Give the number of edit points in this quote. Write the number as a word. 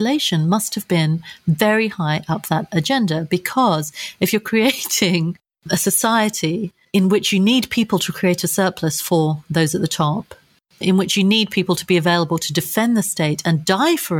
zero